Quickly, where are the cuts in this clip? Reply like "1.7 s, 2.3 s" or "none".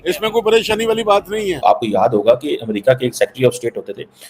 1.6 s